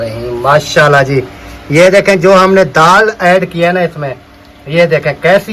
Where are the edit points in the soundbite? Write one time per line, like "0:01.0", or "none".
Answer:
none